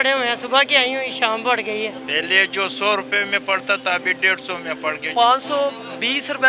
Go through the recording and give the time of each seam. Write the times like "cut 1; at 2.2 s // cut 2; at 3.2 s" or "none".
cut 1; at 2.0 s // cut 2; at 5.1 s